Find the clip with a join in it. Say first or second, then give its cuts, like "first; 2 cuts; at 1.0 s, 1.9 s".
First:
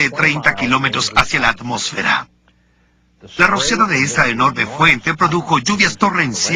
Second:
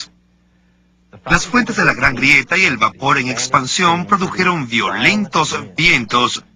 second; 1 cut; at 1.3 s